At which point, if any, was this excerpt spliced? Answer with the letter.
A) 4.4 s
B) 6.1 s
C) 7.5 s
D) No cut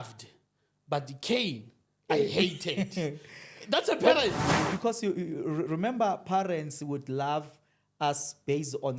A